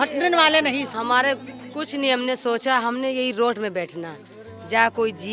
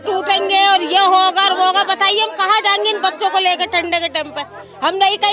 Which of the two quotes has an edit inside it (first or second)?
first